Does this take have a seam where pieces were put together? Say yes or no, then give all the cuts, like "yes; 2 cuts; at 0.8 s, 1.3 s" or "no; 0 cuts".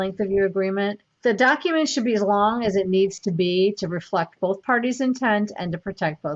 yes; 1 cut; at 1.1 s